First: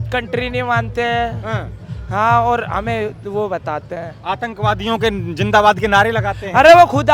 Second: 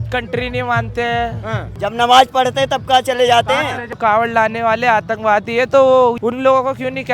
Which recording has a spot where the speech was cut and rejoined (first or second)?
second